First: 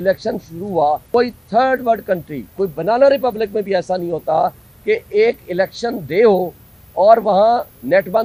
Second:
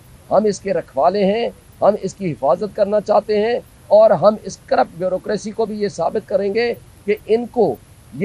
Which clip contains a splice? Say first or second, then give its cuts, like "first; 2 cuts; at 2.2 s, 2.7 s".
first; 1 cut; at 1.0 s